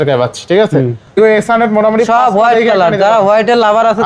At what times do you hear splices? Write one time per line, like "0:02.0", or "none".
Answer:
0:01.2